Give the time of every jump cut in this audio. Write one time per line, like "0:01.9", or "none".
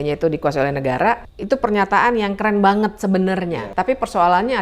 0:01.3
0:03.4

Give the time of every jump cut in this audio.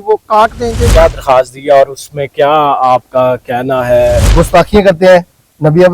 0:00.8
0:04.3

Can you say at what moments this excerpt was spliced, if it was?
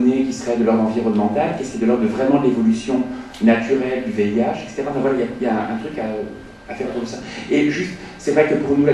0:06.7

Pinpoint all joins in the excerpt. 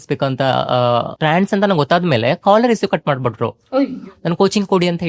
0:01.1

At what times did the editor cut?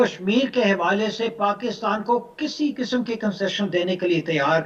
none

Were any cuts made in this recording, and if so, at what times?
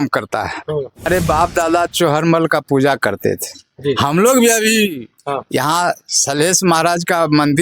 0:01.1

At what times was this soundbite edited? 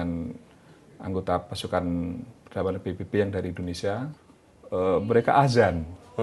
0:04.1

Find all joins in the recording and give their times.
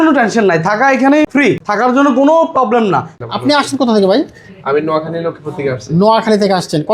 0:01.5
0:03.1

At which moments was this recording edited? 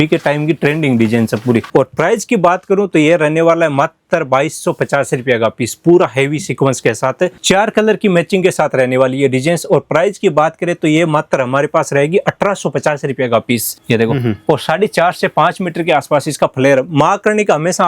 0:01.7
0:07.4
0:13.7

